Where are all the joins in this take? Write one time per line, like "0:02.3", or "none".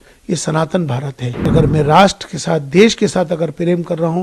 0:01.5